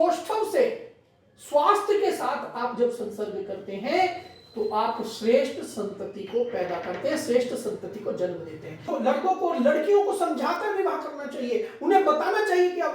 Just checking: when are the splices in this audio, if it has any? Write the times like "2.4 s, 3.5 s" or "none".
8.9 s